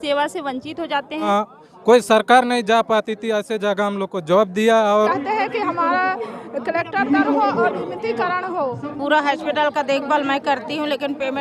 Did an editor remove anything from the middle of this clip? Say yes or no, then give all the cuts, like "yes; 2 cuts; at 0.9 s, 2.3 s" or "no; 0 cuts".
yes; 3 cuts; at 1.3 s, 5.1 s, 8.8 s